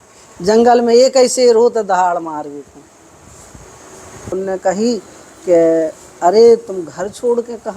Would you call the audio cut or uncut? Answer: cut